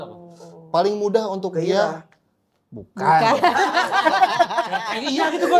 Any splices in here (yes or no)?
no